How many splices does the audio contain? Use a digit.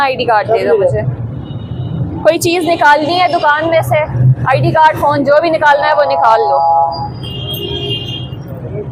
0